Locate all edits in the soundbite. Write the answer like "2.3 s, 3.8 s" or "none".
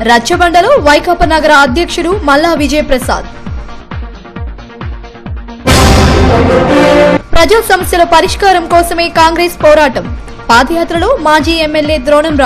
5.5 s, 7.1 s